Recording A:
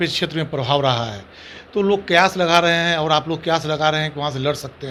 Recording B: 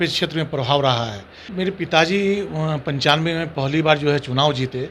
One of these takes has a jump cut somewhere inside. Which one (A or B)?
B